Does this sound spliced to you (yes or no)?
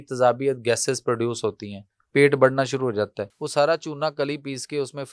yes